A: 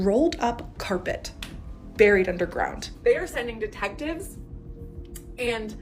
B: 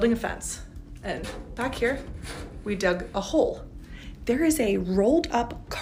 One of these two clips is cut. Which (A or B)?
A